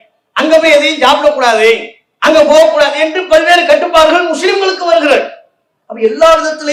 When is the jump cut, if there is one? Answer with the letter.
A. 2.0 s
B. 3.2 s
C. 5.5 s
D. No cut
D